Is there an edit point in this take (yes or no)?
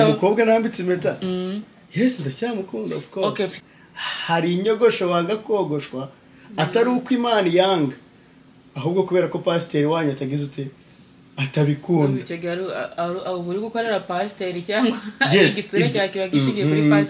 yes